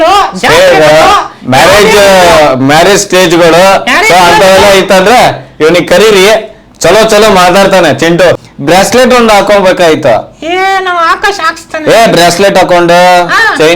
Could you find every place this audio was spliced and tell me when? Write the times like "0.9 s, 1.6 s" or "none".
8.5 s